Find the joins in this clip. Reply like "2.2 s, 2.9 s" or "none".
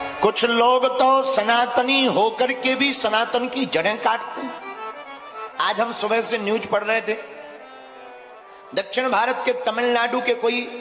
none